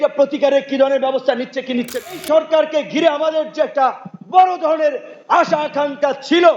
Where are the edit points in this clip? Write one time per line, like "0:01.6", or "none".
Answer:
0:02.2